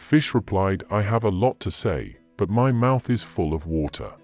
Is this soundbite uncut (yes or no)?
yes